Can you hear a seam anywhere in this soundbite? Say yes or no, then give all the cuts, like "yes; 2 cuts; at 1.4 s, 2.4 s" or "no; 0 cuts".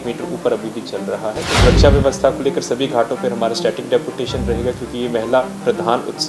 yes; 1 cut; at 1.5 s